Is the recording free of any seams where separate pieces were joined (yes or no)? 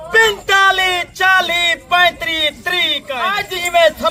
no